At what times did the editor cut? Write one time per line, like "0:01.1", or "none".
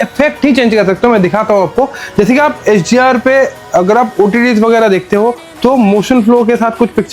none